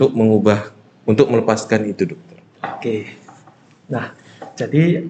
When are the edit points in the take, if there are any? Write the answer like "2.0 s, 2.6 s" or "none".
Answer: none